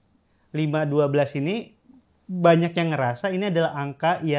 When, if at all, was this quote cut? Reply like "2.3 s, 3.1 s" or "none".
none